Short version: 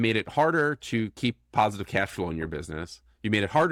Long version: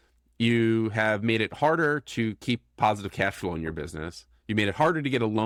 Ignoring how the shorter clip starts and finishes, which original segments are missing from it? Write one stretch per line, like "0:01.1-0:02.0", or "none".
none